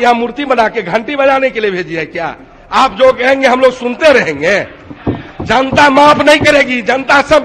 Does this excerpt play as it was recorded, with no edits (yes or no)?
yes